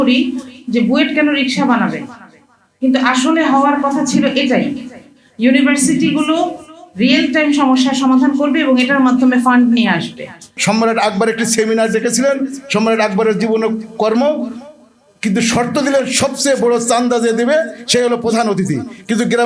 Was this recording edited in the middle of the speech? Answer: yes; 1 cut; at 10.5 s

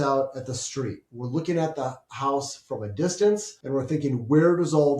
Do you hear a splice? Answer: yes; 1 cut; at 3.5 s

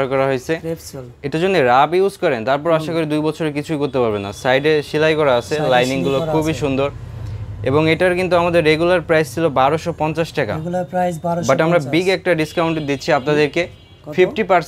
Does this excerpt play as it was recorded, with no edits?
yes; 0 cuts

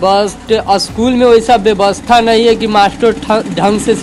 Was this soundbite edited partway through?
no; 0 cuts

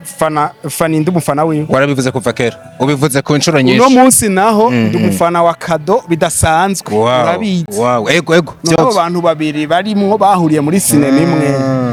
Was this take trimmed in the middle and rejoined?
no; 0 cuts

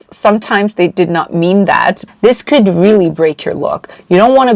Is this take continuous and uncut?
no; 1 cut; at 2.0 s

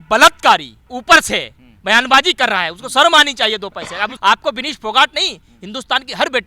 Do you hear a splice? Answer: yes; 2 cuts; at 0.9 s, 4.1 s

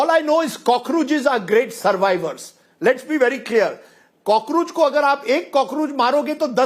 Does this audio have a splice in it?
no; 0 cuts

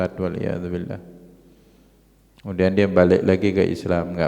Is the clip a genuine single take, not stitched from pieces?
yes; 0 cuts

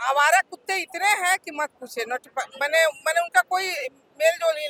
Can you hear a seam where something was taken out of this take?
no; 0 cuts

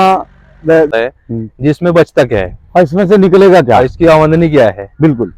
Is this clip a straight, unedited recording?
no; 1 cut; at 0.9 s

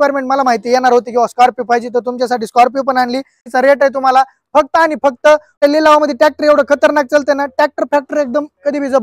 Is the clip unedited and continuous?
no; 2 cuts; at 3.5 s, 5.5 s

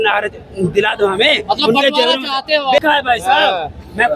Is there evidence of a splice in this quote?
yes; 1 cut; at 2.7 s

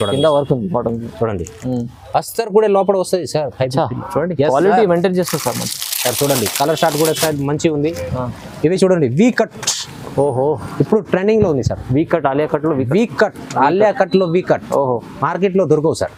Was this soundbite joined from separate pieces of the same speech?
no; 0 cuts

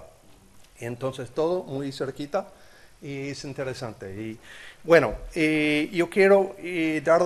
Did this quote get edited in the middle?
no; 0 cuts

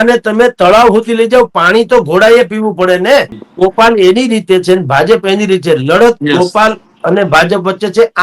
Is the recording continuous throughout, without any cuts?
no; 1 cut; at 3.3 s

